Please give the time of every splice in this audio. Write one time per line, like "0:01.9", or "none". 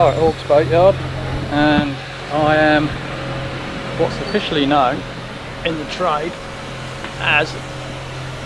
none